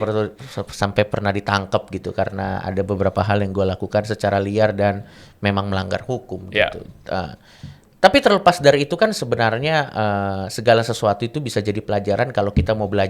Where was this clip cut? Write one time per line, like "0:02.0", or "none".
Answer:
none

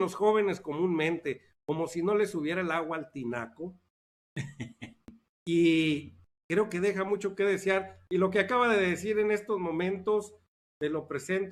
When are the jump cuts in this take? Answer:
none

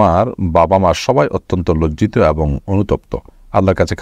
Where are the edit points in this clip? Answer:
none

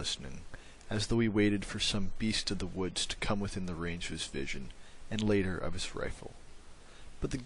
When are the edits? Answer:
0:04.2

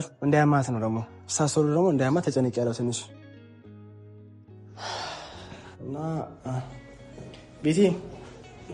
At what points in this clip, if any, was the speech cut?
none

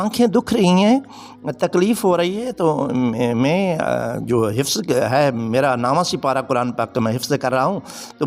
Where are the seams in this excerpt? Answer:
none

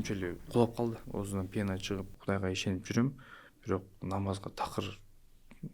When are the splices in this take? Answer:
0:01.0
0:02.2

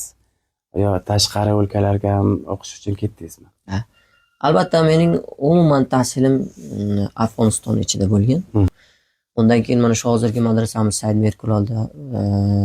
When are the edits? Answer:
0:08.9

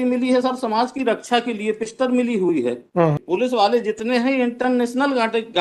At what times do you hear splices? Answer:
0:03.2

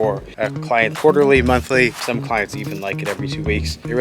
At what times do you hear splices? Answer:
0:00.9

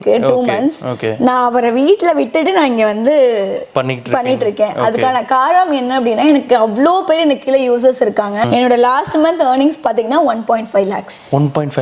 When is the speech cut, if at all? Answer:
0:08.5

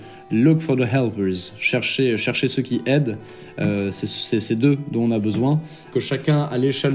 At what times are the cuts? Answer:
0:05.8

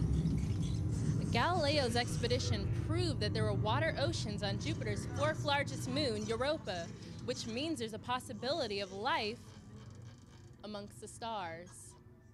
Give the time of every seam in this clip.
none

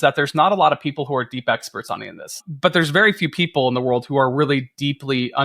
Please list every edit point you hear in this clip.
0:02.4

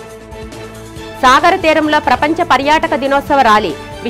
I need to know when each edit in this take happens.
0:01.0

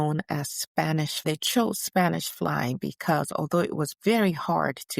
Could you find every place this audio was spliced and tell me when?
0:01.2

